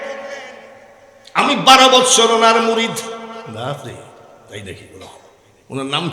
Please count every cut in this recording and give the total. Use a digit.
0